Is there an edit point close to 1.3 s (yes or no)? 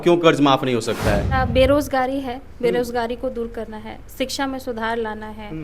yes